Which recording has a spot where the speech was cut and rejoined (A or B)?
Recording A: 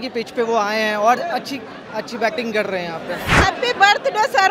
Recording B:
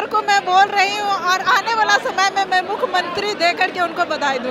A